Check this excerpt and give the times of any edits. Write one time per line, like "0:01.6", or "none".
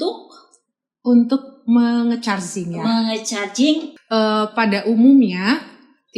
0:03.9